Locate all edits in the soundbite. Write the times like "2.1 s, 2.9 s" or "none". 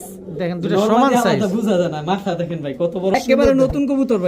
3.1 s